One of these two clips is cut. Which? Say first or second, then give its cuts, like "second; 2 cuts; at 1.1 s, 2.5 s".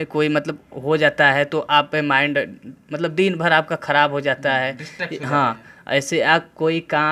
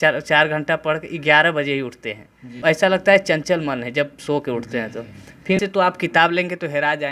second; 2 cuts; at 2.6 s, 5.6 s